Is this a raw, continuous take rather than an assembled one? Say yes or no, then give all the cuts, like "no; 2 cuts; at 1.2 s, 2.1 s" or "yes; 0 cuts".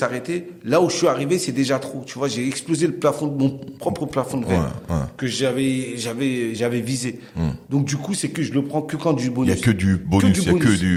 yes; 0 cuts